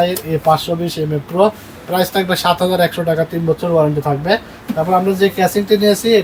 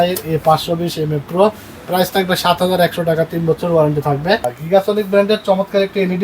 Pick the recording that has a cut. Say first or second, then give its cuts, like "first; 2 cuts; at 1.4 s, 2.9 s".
second; 1 cut; at 4.5 s